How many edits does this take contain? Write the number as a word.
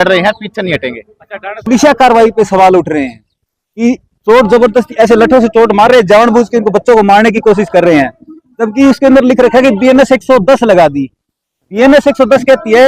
one